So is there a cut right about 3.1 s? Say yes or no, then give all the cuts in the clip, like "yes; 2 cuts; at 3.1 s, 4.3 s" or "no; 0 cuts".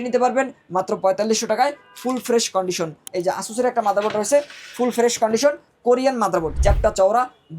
yes; 2 cuts; at 3.1 s, 6.5 s